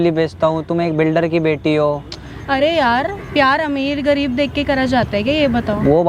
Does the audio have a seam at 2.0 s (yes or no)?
no